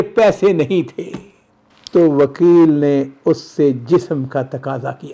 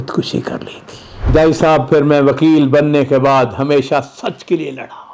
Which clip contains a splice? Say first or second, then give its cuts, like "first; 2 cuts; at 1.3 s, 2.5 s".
second; 1 cut; at 1.3 s